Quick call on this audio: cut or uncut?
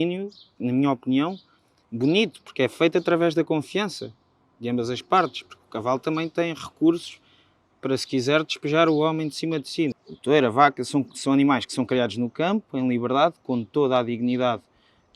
cut